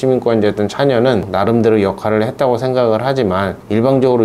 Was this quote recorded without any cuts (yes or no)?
no